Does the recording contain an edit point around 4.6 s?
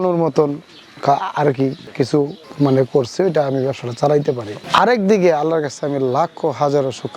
yes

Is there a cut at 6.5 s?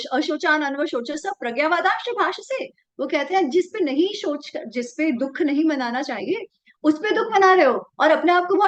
no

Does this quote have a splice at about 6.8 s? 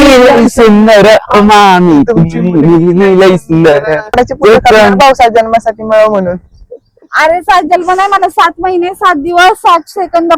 no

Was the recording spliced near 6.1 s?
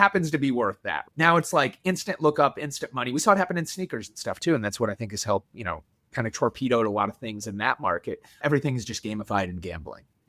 no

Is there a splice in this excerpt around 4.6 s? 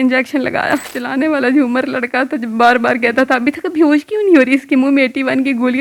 no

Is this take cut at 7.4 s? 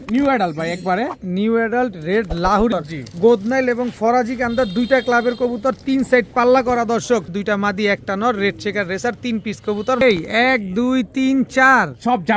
yes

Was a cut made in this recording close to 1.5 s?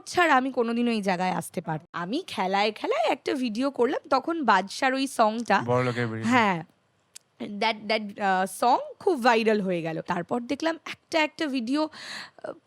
yes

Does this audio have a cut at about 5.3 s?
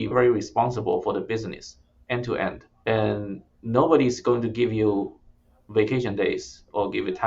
no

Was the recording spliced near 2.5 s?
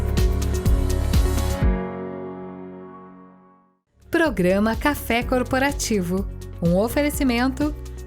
no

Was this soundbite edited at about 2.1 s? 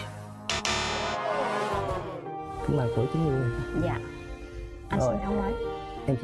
yes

